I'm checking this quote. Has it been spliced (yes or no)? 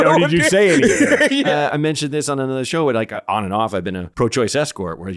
yes